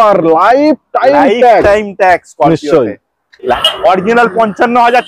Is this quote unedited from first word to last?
no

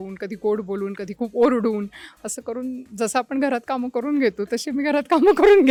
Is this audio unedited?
yes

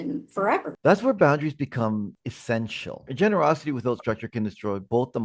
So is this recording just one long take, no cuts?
no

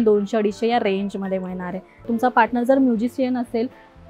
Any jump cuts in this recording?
yes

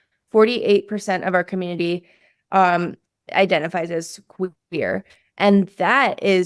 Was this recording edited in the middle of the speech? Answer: no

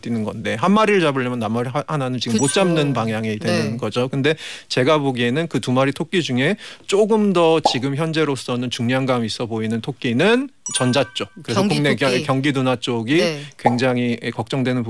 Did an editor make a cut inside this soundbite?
no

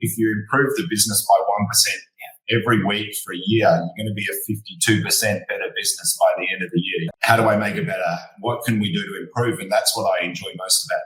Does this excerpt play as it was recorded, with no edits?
no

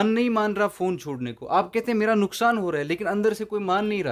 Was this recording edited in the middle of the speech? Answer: no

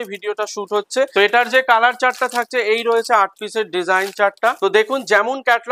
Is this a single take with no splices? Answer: no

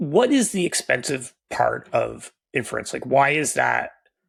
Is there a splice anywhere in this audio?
no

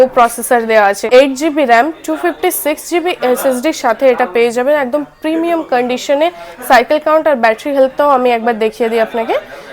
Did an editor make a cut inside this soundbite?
yes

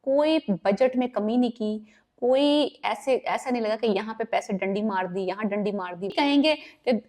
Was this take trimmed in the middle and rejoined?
yes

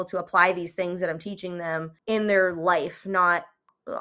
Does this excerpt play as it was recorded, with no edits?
no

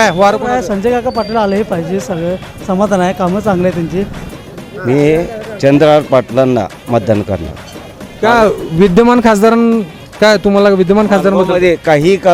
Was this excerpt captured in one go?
no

